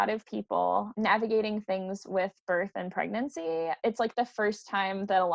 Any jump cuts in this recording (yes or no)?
yes